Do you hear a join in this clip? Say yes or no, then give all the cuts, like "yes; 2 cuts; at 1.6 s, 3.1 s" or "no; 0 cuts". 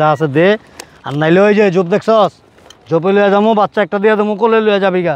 no; 0 cuts